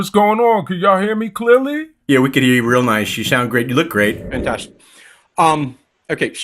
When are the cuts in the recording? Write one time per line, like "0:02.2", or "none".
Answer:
0:04.3